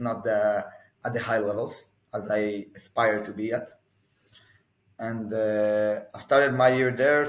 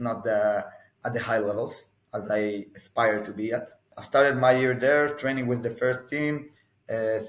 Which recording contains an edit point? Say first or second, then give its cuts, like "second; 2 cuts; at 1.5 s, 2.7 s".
second; 1 cut; at 3.9 s